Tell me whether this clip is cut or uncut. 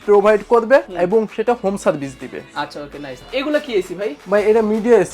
cut